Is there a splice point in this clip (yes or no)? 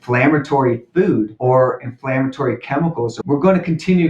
yes